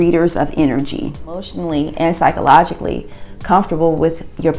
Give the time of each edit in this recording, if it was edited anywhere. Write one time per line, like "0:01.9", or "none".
0:01.6

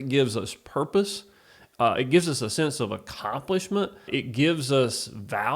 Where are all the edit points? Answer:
0:04.1

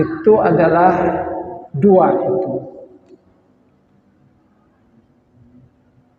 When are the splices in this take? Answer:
none

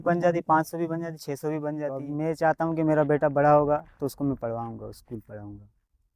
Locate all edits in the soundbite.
0:02.1

